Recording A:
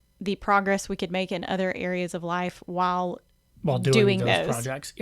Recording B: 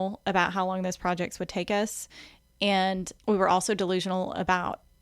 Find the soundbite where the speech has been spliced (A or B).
B